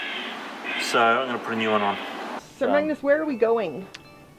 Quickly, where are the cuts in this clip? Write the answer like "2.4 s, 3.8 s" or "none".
2.4 s